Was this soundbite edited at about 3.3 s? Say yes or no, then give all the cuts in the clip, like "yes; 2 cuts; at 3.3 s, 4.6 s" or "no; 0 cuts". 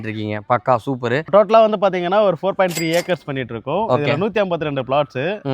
no; 1 cut; at 1.3 s